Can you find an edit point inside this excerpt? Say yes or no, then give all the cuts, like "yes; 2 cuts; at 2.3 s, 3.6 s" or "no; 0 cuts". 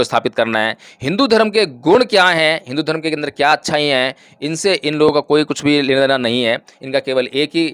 no; 0 cuts